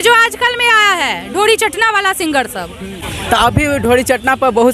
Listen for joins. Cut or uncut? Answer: uncut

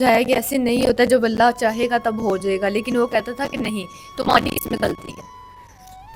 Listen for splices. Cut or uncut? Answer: uncut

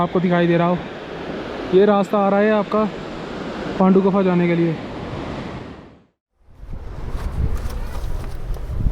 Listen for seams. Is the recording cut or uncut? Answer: cut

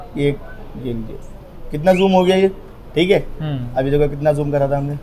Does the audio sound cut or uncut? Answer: uncut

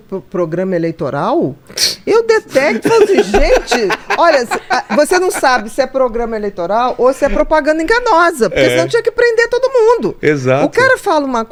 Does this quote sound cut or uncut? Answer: uncut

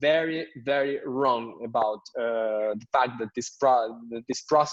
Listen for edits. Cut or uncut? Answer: uncut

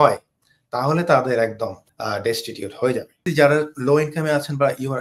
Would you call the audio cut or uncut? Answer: cut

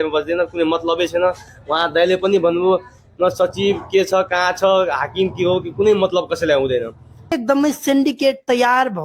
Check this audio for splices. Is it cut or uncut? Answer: cut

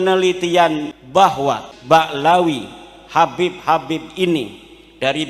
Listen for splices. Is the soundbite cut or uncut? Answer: cut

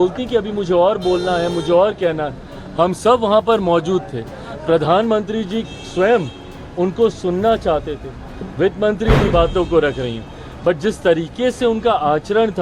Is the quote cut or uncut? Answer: cut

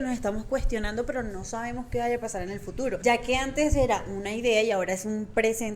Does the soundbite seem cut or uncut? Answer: cut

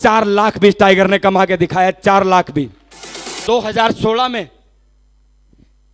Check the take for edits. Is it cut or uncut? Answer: cut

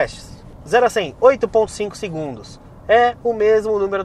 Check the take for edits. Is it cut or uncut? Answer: uncut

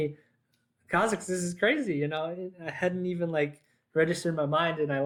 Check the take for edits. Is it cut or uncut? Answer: uncut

